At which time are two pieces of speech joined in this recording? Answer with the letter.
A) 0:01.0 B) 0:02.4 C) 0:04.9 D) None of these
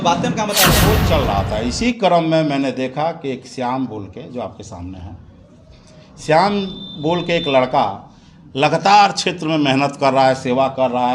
A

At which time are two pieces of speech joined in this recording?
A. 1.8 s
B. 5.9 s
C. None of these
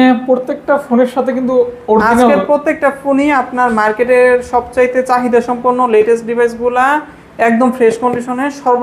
C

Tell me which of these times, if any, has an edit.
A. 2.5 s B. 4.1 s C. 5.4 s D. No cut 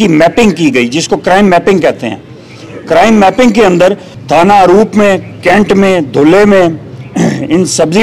B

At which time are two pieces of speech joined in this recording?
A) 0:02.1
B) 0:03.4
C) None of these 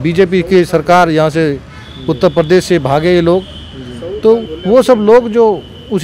C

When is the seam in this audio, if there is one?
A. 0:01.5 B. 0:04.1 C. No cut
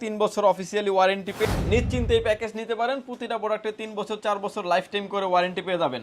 A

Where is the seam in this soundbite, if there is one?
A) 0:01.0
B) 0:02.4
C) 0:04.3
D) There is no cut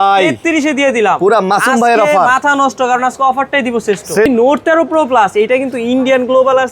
C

